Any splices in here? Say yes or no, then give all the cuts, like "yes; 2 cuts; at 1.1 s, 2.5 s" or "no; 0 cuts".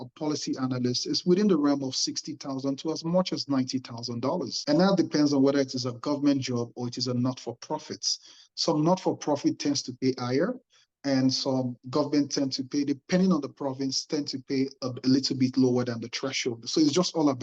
no; 0 cuts